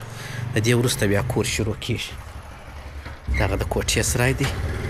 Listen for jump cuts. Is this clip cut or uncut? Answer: uncut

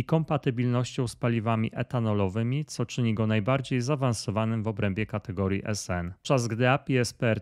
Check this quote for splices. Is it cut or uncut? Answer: cut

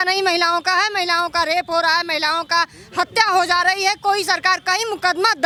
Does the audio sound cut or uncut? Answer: uncut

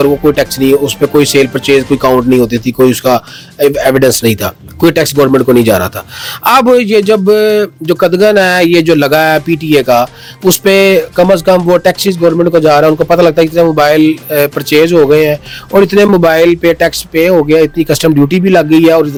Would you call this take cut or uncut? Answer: uncut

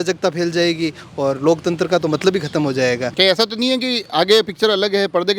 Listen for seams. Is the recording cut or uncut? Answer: cut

